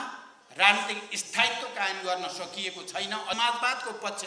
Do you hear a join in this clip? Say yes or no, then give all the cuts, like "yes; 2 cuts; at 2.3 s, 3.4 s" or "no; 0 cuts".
yes; 1 cut; at 3.4 s